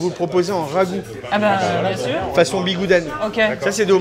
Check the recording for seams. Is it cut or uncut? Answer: uncut